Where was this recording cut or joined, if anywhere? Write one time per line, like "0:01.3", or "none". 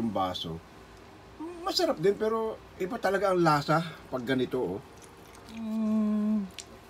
0:05.7